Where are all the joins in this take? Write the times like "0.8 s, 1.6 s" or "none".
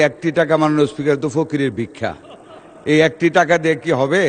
none